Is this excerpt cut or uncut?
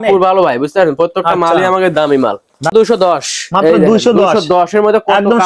cut